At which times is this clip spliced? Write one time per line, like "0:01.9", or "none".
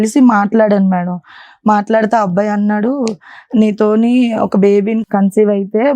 0:05.0